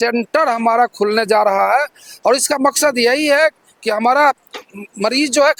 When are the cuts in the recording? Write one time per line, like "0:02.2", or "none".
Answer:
none